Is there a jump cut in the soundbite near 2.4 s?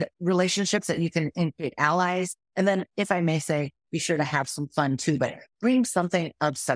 yes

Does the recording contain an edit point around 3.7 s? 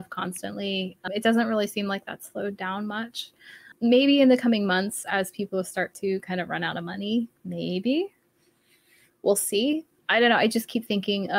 yes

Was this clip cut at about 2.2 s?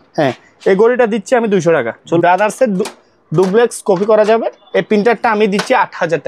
yes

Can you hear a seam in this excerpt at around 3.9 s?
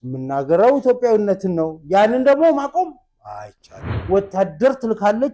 yes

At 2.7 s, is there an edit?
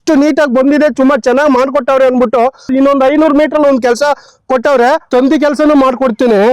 yes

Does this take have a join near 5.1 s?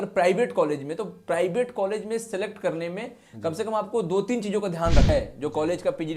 yes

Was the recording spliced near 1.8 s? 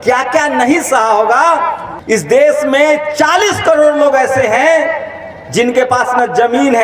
yes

